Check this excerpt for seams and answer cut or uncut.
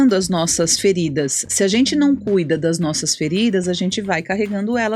uncut